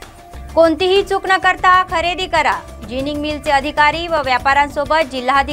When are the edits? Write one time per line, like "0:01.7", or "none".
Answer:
none